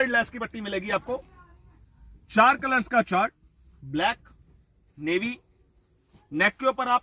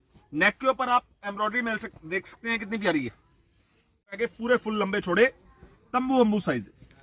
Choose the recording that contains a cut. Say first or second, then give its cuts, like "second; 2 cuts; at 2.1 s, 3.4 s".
second; 1 cut; at 4.2 s